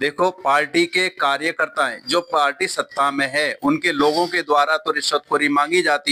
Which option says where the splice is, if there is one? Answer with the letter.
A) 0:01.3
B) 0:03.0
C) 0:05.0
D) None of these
D